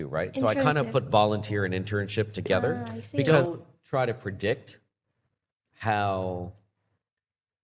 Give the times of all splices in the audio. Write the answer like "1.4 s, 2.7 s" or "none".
3.4 s